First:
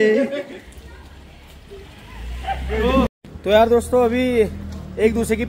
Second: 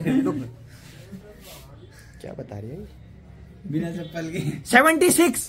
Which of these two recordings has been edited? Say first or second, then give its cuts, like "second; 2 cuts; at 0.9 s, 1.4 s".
first; 1 cut; at 3.1 s